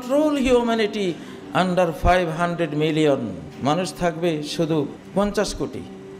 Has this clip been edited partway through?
yes; 2 cuts; at 3.5 s, 5.0 s

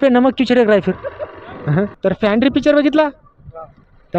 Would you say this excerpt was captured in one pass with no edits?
no; 1 cut; at 1.9 s

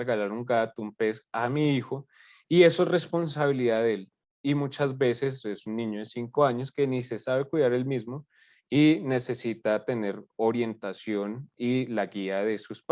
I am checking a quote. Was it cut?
no; 0 cuts

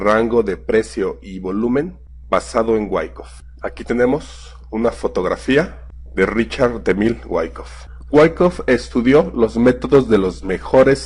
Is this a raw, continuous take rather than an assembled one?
no; 1 cut; at 4.4 s

